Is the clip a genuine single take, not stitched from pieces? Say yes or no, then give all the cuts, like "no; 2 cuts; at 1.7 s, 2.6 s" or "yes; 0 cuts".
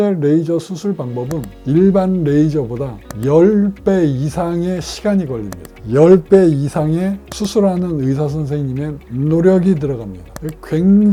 yes; 0 cuts